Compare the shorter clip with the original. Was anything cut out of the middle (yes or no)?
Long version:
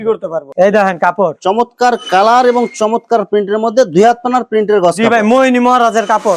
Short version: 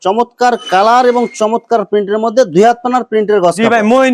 no